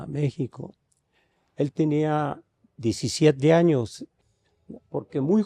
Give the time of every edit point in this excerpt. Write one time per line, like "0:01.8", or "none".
0:04.0

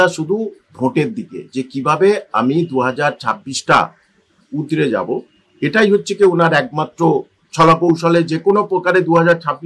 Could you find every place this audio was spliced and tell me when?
none

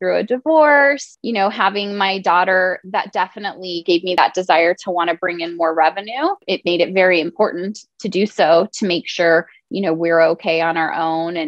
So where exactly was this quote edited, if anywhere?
0:01.1
0:04.2
0:06.4

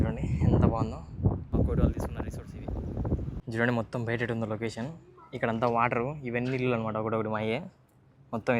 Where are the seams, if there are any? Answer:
0:01.5
0:03.5

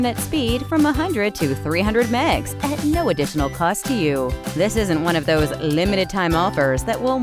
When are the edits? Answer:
none

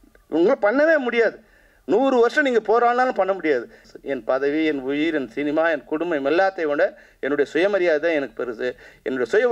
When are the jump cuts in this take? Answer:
0:03.9

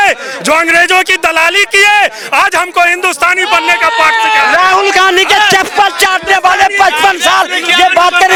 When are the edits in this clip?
none

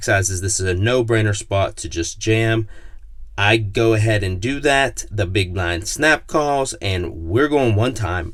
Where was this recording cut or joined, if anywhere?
none

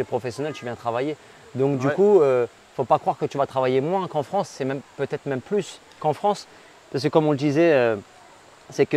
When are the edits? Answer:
none

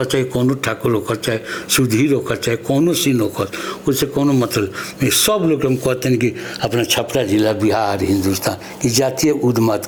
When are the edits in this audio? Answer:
none

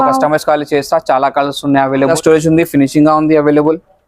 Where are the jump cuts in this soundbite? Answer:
0:02.1

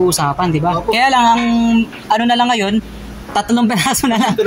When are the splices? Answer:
none

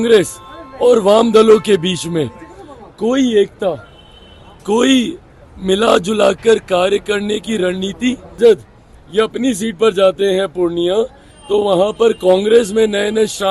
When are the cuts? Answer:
0:08.4

